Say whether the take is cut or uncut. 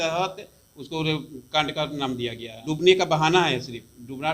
cut